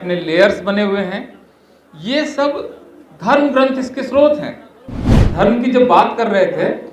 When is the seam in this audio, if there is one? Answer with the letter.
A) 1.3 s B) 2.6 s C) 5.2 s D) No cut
C